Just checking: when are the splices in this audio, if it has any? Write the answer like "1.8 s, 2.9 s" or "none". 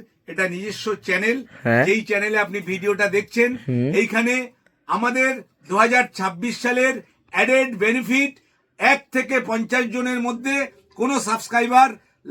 none